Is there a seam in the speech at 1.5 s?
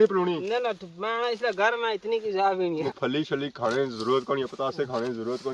no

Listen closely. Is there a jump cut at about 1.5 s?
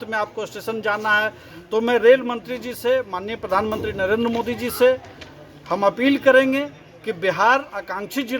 yes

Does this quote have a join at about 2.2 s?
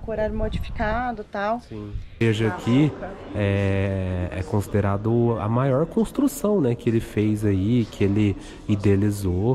yes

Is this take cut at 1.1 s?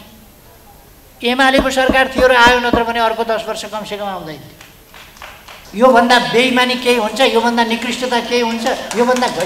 no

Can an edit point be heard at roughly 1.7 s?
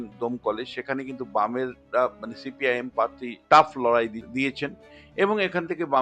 no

